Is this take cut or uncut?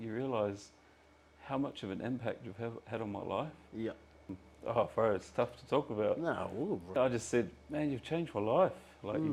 cut